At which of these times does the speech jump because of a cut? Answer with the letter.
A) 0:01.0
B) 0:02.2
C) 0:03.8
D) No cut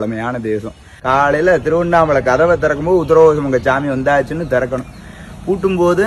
A